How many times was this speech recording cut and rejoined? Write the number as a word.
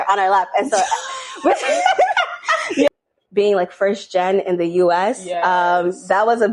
one